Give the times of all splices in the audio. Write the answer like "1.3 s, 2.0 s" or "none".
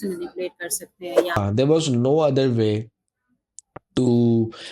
1.4 s